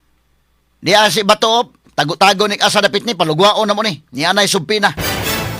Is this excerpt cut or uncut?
uncut